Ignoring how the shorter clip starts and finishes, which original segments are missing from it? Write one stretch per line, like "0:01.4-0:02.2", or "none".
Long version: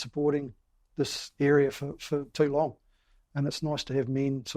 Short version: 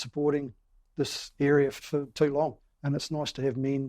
0:01.8-0:02.0
0:02.9-0:03.2